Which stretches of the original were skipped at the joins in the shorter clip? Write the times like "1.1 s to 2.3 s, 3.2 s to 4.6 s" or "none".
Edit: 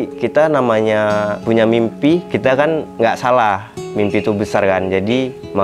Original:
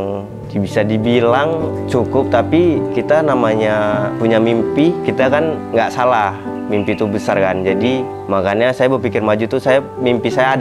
none